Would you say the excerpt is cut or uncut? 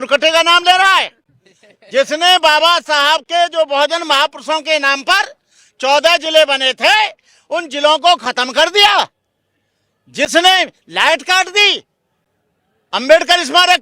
uncut